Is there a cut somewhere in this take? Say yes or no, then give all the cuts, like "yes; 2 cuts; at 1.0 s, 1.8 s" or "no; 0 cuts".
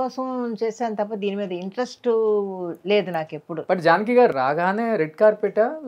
yes; 1 cut; at 3.5 s